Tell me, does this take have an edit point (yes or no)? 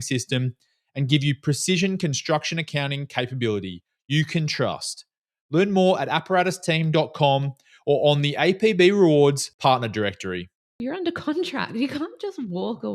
yes